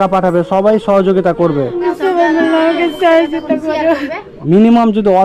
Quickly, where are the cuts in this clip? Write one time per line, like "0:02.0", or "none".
0:01.9
0:04.3